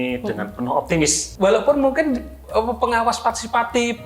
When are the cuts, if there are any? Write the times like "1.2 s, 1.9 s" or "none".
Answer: 1.2 s